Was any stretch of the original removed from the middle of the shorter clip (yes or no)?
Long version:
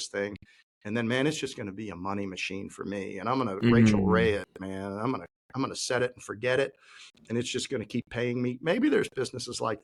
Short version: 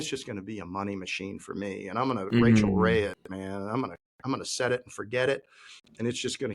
no